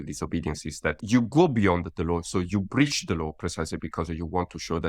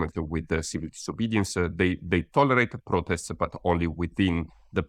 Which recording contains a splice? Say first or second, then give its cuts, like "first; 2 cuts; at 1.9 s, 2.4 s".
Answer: first; 1 cut; at 1.0 s